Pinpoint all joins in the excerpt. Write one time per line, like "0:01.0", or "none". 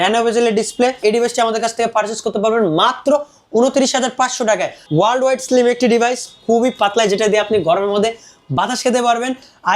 0:01.0
0:04.8